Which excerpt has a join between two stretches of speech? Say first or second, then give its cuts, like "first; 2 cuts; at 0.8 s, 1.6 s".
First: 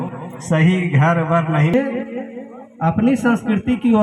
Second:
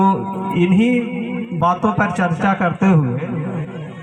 first; 1 cut; at 1.7 s